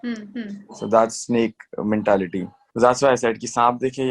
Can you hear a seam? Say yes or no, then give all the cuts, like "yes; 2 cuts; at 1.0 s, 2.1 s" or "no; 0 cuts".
yes; 1 cut; at 2.6 s